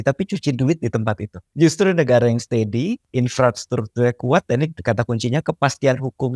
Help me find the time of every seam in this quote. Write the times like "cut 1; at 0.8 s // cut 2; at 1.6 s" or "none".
cut 1; at 1.4 s // cut 2; at 3.0 s